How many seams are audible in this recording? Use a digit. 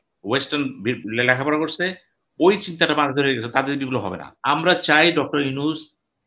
1